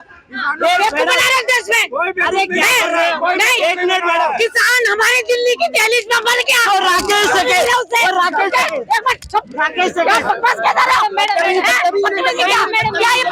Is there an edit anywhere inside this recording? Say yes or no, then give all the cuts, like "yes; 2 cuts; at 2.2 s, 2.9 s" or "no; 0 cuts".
no; 0 cuts